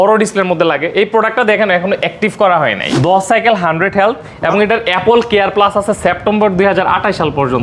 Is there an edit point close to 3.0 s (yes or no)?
yes